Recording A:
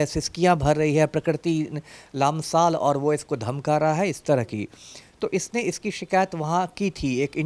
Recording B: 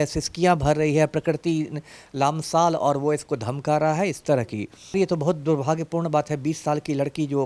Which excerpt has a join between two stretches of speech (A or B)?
B